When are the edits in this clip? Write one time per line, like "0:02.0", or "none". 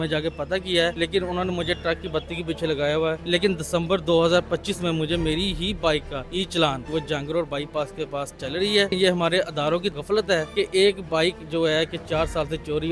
0:00.9
0:03.2
0:06.2
0:06.9
0:08.9
0:10.1